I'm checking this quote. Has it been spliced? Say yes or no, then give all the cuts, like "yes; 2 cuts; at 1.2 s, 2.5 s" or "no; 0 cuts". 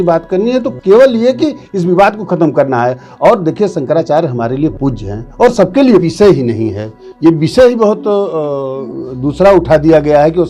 yes; 1 cut; at 6.1 s